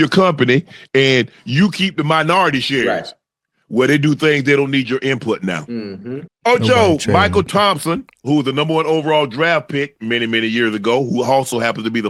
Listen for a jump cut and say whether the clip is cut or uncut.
uncut